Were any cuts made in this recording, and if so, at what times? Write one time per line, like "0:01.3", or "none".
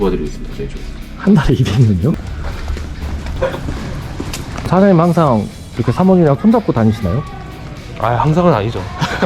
0:02.1
0:04.7